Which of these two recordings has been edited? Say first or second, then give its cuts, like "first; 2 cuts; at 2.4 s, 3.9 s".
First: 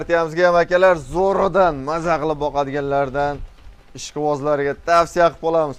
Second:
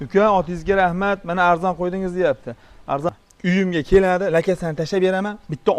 second; 1 cut; at 3.1 s